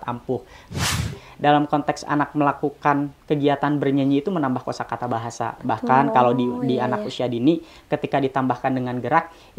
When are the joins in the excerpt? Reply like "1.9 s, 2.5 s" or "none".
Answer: 1.1 s